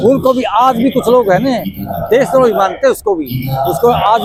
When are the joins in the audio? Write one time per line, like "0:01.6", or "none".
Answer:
none

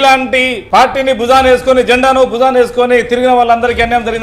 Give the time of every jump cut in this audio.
none

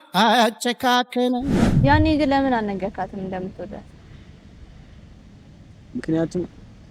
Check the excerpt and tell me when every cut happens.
0:01.7

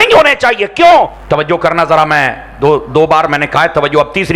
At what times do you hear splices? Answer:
0:01.2

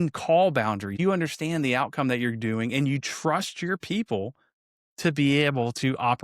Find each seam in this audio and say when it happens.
0:00.9

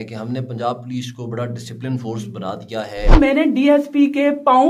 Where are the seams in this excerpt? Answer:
0:03.1

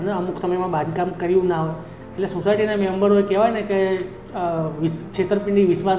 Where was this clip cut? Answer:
none

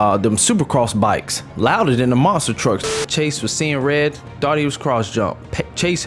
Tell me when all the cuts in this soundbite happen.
0:01.5
0:02.9

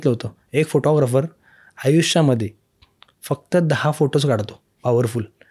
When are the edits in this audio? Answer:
none

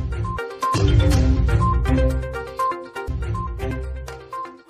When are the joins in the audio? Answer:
0:02.9

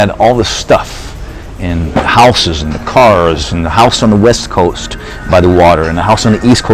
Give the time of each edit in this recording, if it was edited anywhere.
none

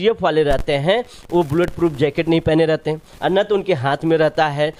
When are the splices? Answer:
none

